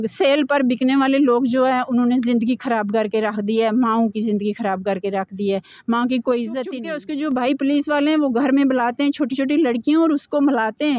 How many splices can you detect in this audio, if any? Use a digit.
1